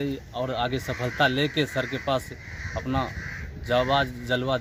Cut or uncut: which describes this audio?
uncut